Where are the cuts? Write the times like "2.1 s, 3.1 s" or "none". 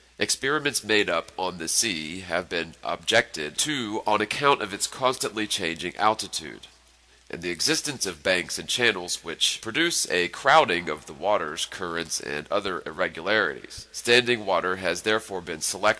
none